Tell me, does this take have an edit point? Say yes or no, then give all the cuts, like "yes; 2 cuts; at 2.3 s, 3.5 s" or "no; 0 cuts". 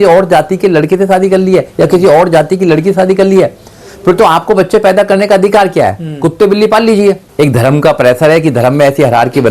yes; 1 cut; at 7.3 s